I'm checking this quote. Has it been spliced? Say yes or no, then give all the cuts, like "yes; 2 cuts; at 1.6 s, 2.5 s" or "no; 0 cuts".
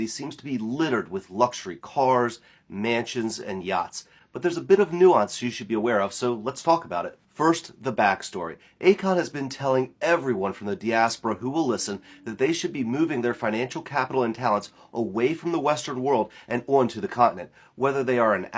no; 0 cuts